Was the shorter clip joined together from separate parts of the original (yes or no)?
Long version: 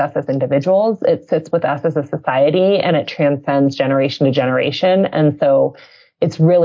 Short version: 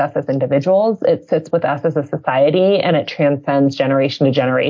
no